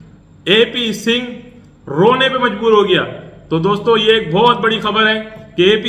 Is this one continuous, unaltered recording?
yes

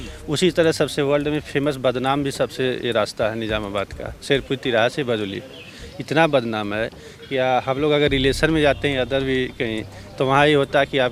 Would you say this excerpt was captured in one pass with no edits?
yes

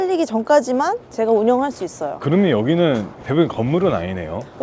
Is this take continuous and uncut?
no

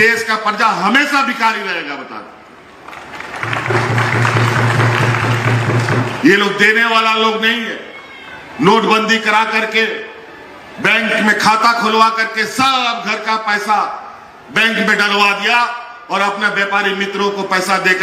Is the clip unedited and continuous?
yes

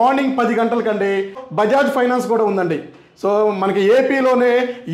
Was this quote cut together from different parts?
yes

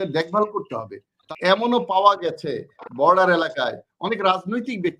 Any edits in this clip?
yes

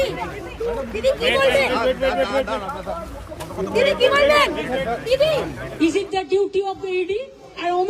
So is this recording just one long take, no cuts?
no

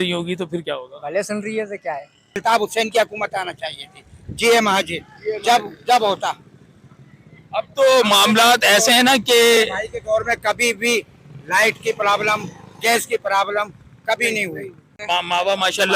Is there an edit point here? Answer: yes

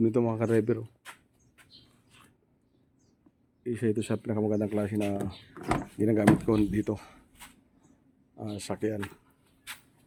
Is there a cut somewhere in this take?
no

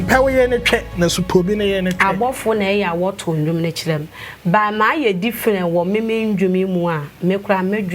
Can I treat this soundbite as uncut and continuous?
yes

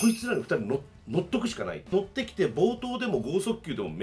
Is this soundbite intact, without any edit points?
no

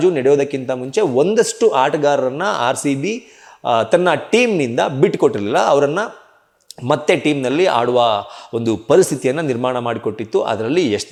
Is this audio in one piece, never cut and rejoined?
yes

